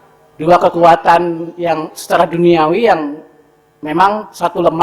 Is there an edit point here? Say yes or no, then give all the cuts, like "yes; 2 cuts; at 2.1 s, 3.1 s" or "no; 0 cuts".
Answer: no; 0 cuts